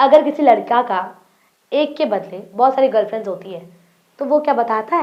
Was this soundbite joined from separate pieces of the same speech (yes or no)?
no